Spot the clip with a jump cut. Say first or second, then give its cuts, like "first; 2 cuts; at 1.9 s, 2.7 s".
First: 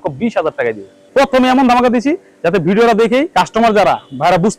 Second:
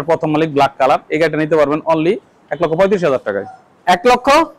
first; 2 cuts; at 0.9 s, 3.3 s